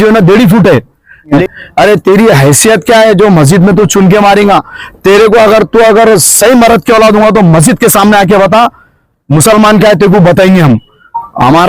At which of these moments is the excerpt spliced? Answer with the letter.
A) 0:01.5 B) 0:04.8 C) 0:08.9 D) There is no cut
A